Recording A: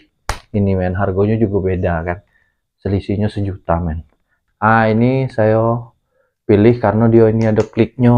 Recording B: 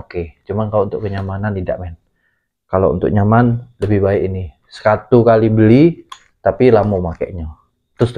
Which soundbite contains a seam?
A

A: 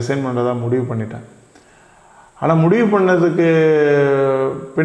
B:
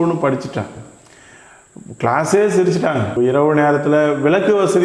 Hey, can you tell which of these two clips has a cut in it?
B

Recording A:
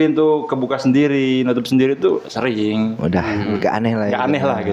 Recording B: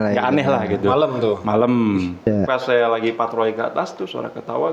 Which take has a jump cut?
B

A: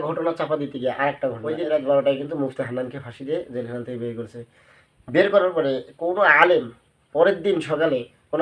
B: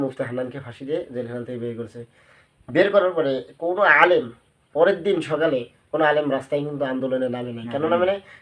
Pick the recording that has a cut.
A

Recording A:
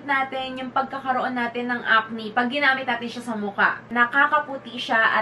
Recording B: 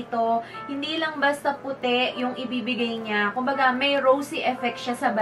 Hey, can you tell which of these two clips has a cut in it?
A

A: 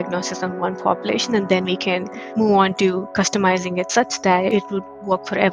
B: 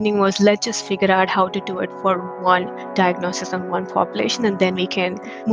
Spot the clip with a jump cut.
A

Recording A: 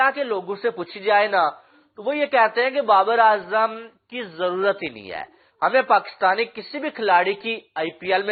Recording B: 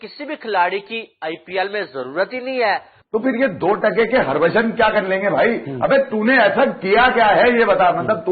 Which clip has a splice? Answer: B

